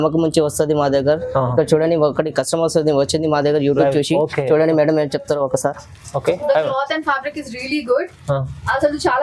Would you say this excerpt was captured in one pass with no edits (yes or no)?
yes